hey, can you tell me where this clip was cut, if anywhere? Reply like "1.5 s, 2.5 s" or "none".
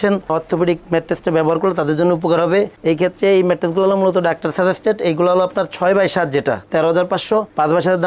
none